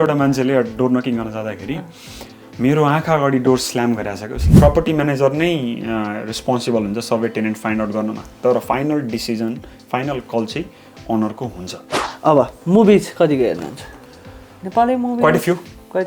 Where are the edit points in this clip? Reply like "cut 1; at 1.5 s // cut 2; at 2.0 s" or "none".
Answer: cut 1; at 4.5 s // cut 2; at 12.0 s